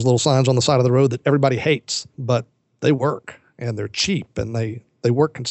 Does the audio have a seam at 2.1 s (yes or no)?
yes